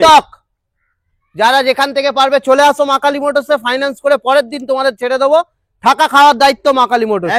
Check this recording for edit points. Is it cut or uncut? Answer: uncut